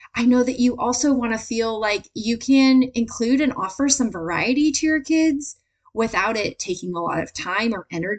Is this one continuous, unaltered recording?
yes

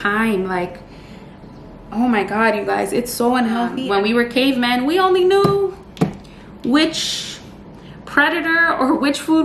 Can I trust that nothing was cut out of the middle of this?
no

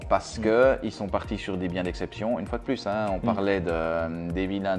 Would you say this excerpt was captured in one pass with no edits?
yes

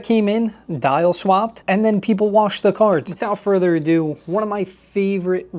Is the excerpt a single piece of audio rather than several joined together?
no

